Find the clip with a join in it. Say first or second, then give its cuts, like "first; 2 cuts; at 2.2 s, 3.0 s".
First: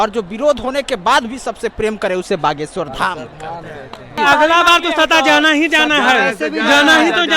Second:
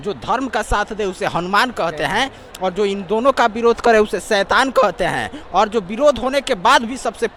first; 1 cut; at 4.2 s